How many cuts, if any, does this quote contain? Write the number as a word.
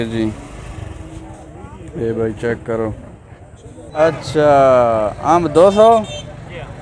one